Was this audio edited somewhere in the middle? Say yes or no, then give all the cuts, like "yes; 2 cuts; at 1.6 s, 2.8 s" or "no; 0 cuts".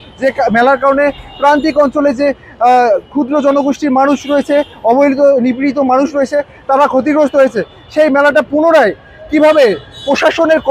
no; 0 cuts